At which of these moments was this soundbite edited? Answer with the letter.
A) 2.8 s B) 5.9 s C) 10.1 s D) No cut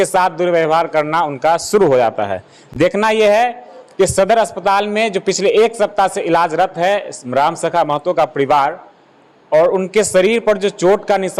D